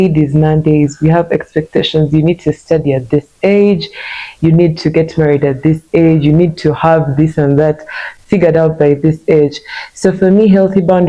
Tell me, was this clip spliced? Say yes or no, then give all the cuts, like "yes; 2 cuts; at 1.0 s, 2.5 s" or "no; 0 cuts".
no; 0 cuts